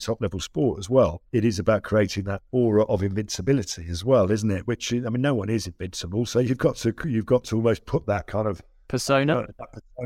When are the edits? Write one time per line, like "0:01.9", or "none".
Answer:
0:01.2
0:02.4
0:04.6
0:08.7